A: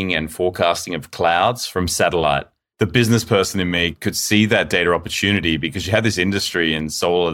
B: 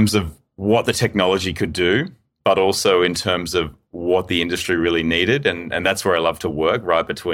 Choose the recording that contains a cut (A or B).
A